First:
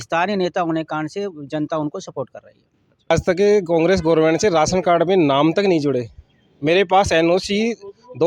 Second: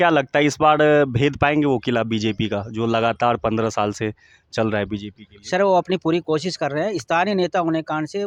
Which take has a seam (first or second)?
first